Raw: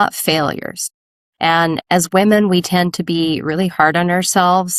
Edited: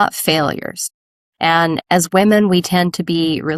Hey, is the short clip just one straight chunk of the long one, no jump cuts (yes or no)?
yes